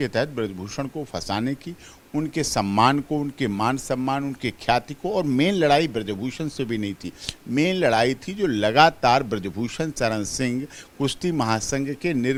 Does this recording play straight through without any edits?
yes; 0 cuts

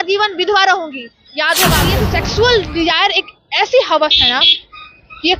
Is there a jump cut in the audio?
yes; 1 cut; at 2.0 s

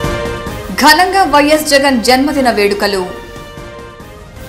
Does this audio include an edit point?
no; 0 cuts

